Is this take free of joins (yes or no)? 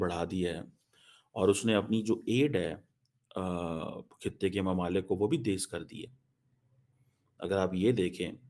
yes